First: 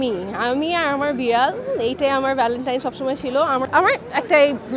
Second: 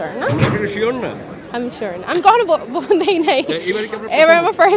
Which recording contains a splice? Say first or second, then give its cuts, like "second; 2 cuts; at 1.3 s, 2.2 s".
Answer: first; 1 cut; at 3.7 s